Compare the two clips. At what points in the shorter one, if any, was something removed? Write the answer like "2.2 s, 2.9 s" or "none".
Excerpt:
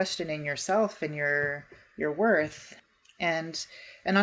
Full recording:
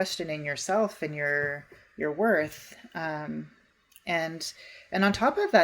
2.8 s

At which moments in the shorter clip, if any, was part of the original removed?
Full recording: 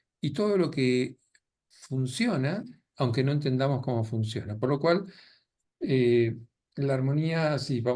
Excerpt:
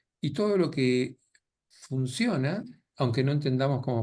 none

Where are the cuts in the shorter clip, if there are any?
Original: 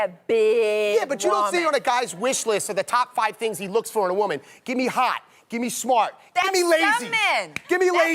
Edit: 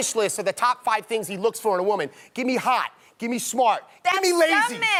none

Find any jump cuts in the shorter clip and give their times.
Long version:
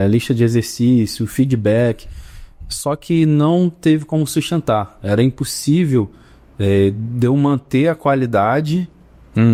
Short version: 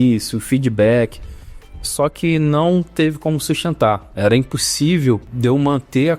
5.3 s

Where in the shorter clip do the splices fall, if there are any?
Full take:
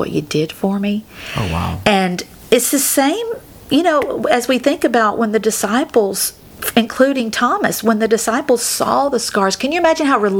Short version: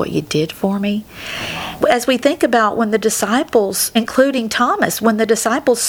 1.7 s, 3.8 s

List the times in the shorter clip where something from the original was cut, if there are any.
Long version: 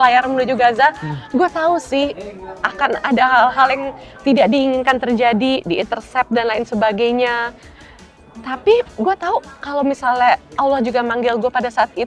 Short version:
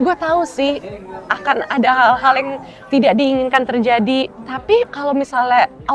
4.8 s

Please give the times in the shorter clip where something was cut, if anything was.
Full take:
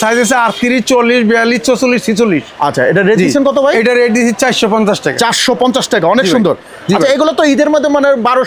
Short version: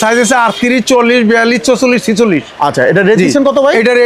none

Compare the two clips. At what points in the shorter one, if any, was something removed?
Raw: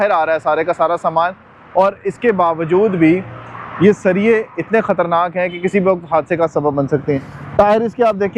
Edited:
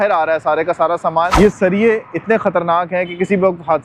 1.3 s

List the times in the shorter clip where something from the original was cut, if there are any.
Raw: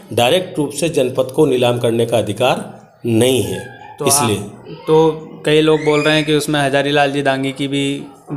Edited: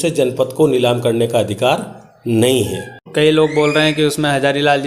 3.0 s

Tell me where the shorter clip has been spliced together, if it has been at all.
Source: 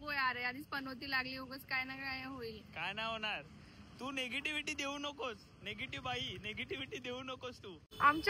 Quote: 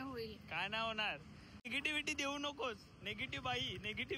1.7 s

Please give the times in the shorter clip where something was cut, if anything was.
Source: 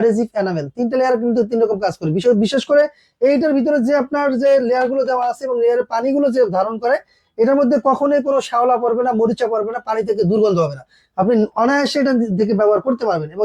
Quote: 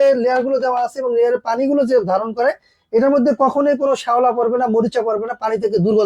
none

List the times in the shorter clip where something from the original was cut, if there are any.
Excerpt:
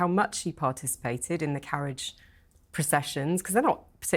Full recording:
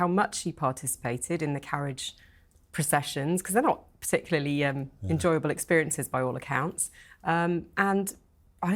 none

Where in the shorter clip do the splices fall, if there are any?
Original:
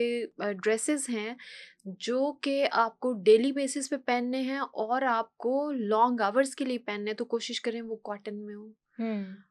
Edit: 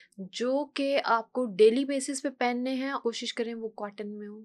3.0 s

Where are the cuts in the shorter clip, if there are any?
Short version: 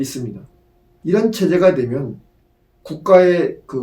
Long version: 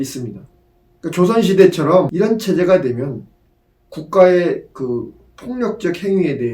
1.0 s

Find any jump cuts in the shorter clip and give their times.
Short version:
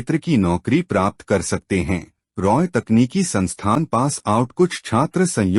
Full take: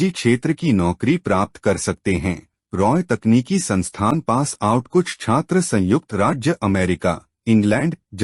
none

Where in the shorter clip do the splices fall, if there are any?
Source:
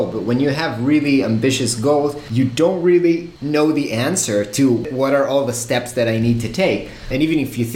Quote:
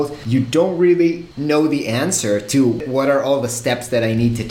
none

